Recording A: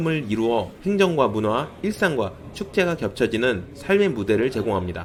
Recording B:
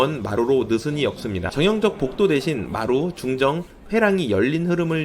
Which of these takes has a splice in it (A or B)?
B